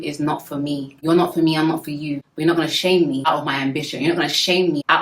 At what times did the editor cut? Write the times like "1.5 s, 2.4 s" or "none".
0.9 s, 2.2 s

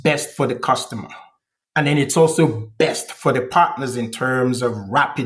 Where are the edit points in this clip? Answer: none

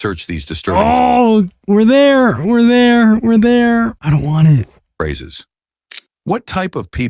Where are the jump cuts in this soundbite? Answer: 4.0 s

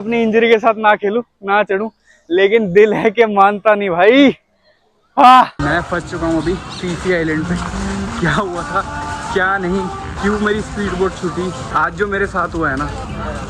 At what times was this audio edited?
5.6 s, 11.7 s

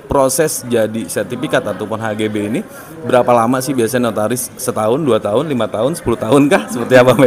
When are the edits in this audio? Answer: none

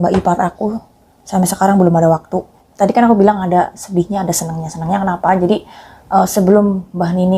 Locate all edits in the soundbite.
2.6 s

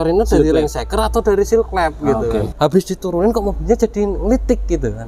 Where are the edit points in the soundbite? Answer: 2.5 s

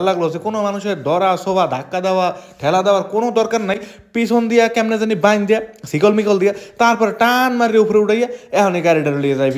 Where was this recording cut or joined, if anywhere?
none

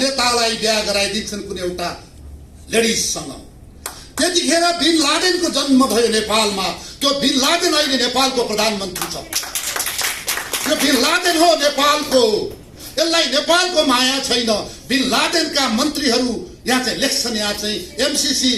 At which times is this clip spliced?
none

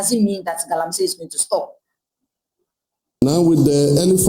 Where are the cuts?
3.1 s

